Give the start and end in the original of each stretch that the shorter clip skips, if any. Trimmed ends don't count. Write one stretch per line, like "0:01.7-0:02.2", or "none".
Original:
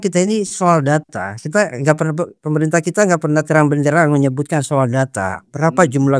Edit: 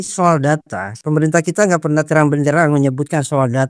0:01.4-0:02.4